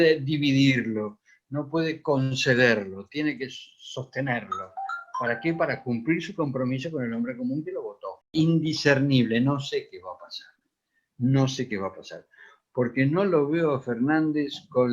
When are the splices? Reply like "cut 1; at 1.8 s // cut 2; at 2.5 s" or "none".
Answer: cut 1; at 8.3 s